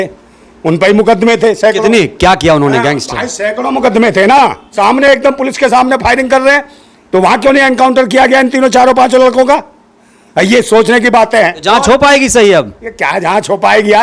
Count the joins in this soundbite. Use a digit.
2